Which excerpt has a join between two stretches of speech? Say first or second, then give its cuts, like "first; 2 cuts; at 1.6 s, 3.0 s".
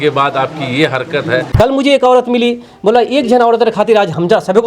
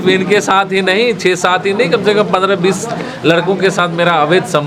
first; 1 cut; at 1.5 s